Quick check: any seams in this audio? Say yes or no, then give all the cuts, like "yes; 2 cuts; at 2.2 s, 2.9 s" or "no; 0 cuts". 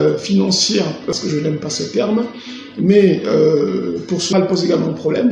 yes; 2 cuts; at 1.1 s, 4.3 s